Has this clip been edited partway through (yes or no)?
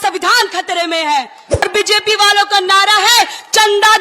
yes